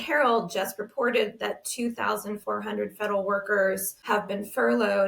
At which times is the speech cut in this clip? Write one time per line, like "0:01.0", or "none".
0:04.0